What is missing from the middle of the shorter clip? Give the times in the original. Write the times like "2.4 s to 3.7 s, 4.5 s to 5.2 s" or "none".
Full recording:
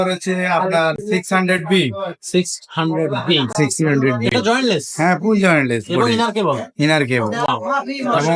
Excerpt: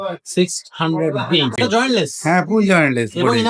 3.5 s to 4.3 s